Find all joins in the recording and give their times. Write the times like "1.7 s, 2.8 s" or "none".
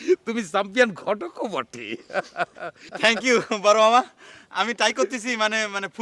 2.9 s